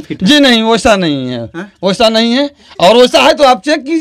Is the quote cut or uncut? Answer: uncut